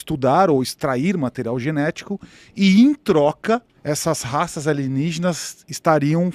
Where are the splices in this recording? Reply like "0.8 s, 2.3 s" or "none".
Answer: none